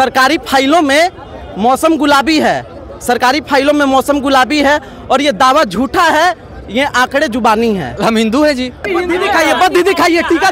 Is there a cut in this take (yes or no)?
yes